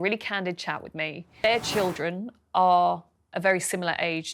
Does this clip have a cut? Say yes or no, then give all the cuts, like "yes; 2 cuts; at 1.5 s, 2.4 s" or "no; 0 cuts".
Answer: yes; 1 cut; at 1.4 s